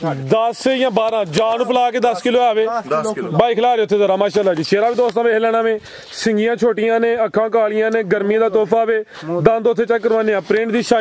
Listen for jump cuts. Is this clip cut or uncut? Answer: uncut